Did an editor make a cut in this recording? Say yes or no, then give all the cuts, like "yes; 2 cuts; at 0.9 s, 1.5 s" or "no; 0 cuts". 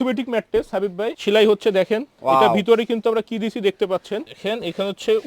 yes; 2 cuts; at 1.2 s, 4.3 s